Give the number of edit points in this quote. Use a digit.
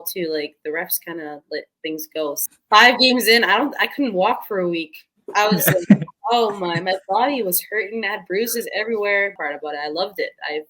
2